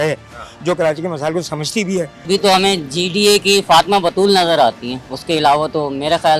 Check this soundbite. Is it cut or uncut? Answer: cut